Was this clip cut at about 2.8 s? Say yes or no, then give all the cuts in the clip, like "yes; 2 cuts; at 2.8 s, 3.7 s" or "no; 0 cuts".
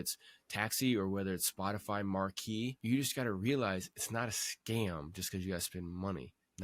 yes; 2 cuts; at 2.8 s, 3.9 s